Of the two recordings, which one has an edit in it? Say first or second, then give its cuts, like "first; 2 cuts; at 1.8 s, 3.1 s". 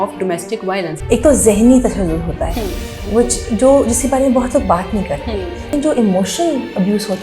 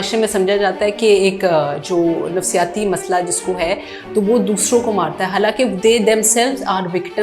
first; 2 cuts; at 1.0 s, 5.7 s